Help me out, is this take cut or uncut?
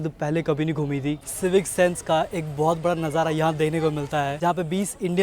cut